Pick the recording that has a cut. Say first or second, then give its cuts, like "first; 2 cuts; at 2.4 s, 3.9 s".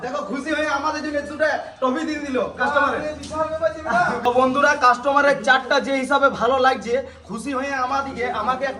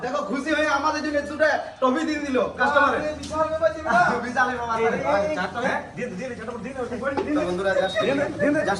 first; 1 cut; at 4.2 s